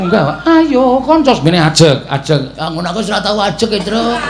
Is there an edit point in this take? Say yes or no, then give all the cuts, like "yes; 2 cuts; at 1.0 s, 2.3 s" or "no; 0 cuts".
no; 0 cuts